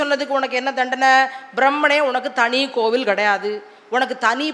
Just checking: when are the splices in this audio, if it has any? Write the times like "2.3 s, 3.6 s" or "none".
none